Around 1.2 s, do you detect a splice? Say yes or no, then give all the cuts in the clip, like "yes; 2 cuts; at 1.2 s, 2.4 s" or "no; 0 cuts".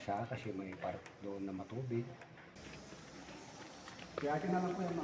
no; 1 cut; at 2.6 s